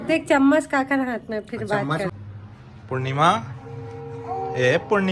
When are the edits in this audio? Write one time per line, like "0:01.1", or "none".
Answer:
0:02.1